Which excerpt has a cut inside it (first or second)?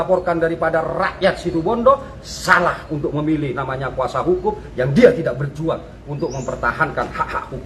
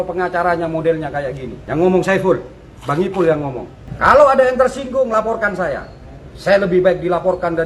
second